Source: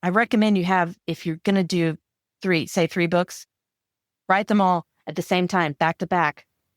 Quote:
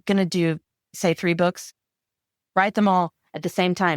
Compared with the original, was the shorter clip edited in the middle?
yes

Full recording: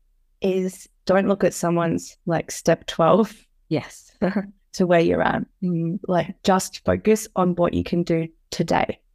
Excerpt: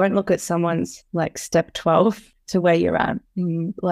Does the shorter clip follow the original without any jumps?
no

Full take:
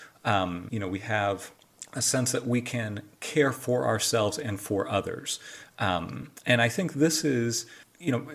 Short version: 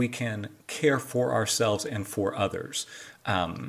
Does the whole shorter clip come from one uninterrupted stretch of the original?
yes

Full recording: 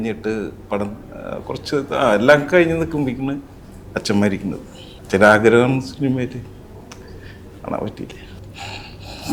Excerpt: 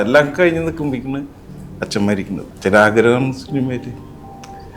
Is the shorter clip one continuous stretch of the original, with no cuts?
no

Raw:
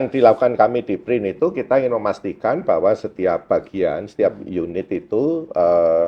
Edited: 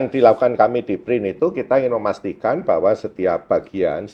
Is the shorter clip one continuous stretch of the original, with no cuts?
yes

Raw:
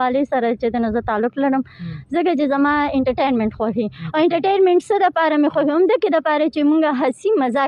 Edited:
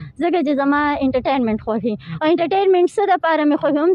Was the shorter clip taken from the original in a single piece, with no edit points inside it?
yes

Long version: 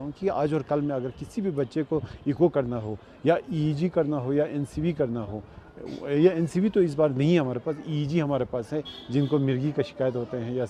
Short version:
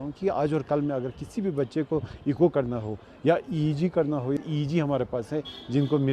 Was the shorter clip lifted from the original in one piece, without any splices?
no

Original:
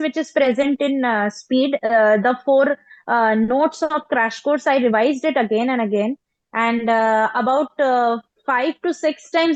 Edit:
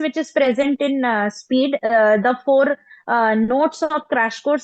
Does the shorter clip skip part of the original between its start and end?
no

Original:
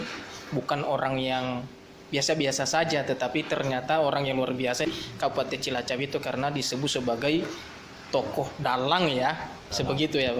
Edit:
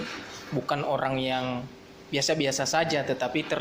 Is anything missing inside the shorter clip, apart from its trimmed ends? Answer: no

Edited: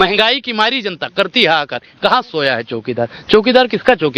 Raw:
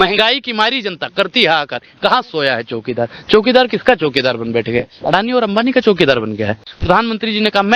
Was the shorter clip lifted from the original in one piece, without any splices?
yes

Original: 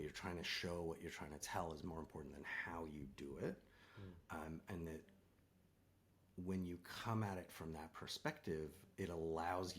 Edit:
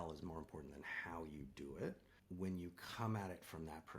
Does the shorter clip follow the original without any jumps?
no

